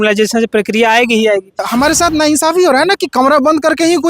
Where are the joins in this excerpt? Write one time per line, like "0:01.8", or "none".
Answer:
0:01.6